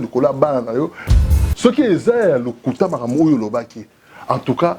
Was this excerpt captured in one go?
no; 1 cut; at 1.0 s

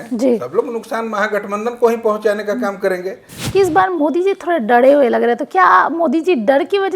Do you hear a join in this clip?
yes; 1 cut; at 3.3 s

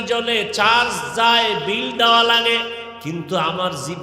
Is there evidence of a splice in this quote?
yes; 1 cut; at 2.9 s

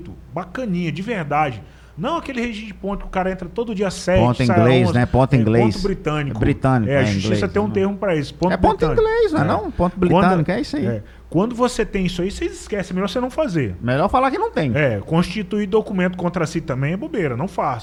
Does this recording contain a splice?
no; 0 cuts

